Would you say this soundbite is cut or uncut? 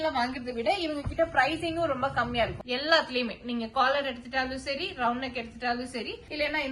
cut